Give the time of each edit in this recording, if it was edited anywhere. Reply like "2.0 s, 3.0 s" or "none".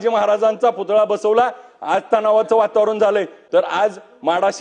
3.4 s